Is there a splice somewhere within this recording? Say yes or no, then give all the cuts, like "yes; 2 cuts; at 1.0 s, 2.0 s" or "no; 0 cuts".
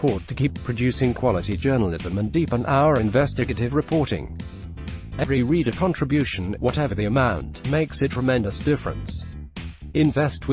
no; 0 cuts